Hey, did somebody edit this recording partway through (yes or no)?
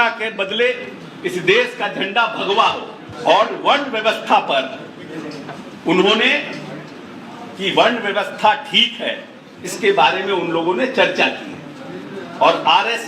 yes